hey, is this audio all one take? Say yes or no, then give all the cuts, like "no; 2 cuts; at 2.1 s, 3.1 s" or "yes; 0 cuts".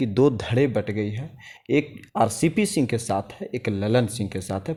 yes; 0 cuts